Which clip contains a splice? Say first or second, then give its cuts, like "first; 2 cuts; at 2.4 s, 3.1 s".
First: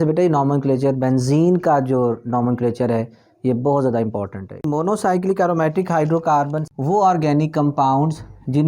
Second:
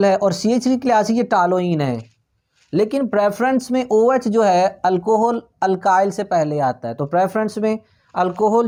first; 2 cuts; at 4.7 s, 6.6 s